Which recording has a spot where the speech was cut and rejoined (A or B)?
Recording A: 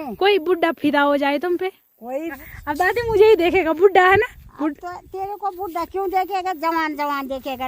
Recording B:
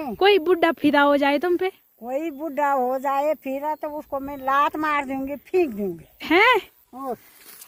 A